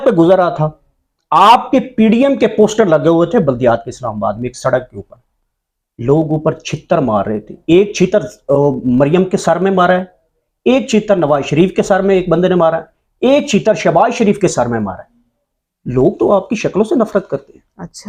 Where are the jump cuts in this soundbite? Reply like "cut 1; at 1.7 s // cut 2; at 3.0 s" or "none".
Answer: none